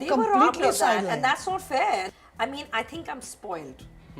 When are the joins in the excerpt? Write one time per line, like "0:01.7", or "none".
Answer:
0:02.1